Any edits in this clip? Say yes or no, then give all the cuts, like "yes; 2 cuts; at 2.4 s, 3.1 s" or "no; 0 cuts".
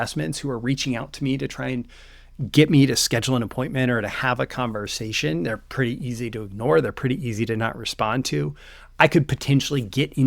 no; 0 cuts